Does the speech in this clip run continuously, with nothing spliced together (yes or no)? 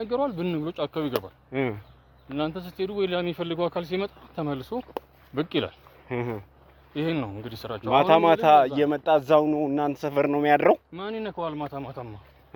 yes